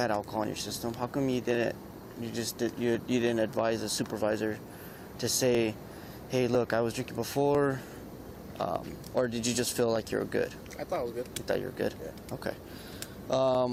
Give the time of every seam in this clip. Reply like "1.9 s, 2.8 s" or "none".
none